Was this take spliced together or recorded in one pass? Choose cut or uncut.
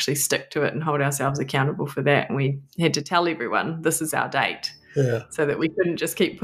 uncut